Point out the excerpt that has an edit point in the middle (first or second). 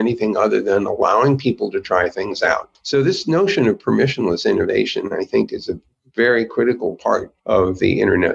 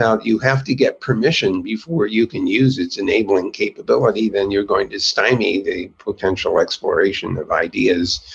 first